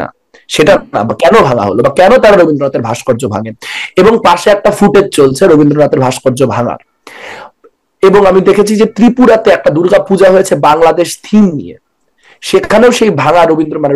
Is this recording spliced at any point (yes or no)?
no